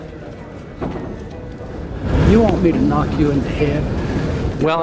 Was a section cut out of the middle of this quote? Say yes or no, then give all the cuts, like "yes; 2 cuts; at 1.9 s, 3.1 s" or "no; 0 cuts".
no; 0 cuts